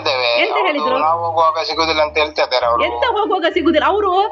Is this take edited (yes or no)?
no